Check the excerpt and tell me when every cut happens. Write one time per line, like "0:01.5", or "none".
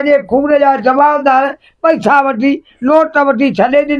none